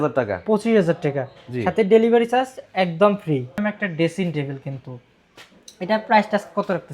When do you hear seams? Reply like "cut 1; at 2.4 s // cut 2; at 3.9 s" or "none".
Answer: cut 1; at 3.6 s